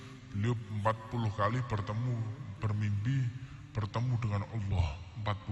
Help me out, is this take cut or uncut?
uncut